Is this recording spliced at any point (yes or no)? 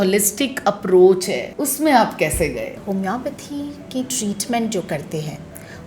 yes